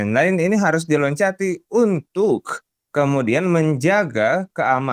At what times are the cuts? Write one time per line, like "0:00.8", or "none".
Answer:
none